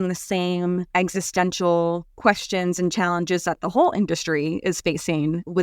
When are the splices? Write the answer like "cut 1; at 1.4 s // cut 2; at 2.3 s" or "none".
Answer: cut 1; at 0.9 s // cut 2; at 2.1 s

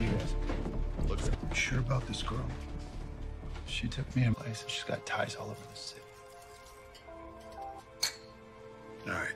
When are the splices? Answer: cut 1; at 1.4 s

